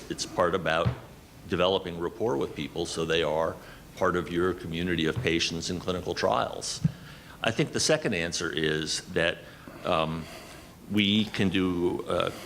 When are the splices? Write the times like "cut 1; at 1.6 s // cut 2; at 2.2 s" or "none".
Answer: cut 1; at 6.8 s

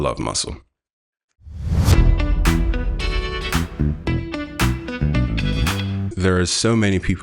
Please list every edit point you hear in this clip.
cut 1; at 6.0 s

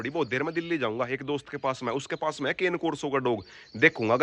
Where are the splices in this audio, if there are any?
none

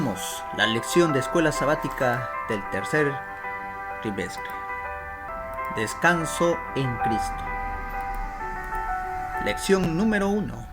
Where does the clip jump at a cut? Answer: cut 1; at 5.3 s

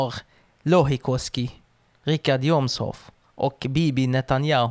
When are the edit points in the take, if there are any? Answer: none

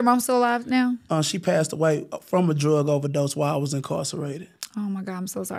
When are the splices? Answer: none

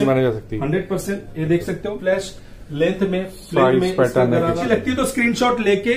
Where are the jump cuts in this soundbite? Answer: cut 1; at 2.0 s // cut 2; at 4.6 s

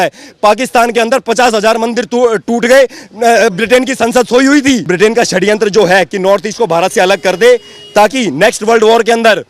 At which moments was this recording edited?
cut 1; at 4.9 s

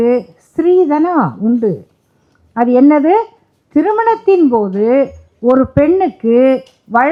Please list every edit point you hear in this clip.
none

